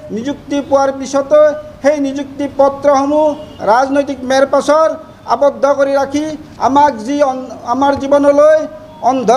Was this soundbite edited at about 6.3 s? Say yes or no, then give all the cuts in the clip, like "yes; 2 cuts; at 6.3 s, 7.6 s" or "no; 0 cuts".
no; 0 cuts